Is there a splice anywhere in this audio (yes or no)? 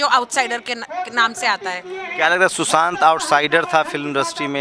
no